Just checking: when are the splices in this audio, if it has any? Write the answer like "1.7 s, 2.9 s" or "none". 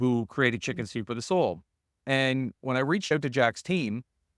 none